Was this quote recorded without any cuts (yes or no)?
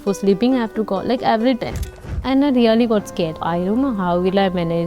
no